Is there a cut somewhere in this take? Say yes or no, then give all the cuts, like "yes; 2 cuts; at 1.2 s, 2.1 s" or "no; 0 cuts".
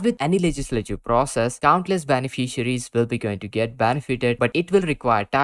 no; 0 cuts